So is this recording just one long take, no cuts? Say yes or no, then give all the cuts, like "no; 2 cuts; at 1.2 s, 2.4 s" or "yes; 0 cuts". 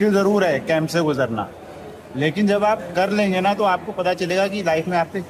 yes; 0 cuts